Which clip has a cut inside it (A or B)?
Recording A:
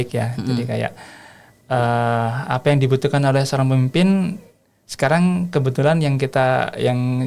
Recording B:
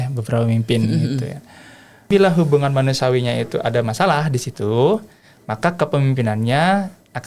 B